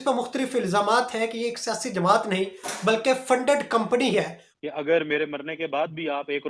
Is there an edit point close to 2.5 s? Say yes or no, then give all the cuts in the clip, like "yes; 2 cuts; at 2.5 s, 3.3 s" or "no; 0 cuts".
no; 1 cut; at 4.4 s